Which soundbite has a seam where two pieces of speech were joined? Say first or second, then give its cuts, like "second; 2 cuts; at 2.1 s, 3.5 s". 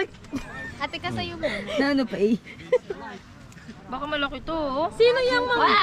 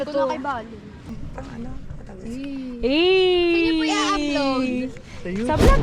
second; 1 cut; at 1.0 s